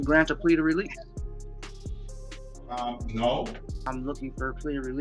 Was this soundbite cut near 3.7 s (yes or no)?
yes